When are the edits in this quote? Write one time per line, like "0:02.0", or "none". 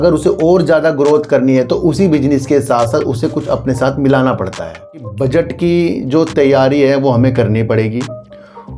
0:05.1